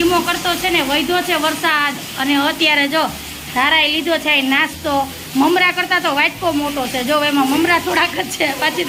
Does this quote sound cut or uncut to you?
uncut